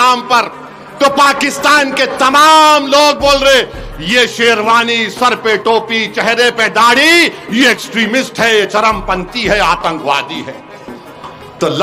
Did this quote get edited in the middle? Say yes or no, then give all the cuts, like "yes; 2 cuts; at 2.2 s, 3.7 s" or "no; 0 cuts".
no; 0 cuts